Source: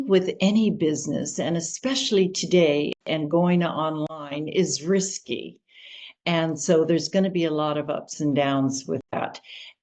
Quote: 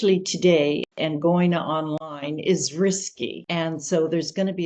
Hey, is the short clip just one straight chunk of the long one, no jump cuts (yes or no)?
no